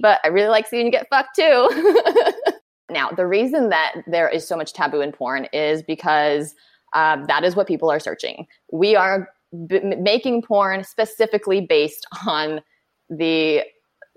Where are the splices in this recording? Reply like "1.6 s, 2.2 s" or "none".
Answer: 3.0 s